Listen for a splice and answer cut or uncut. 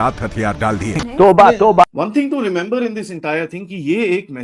cut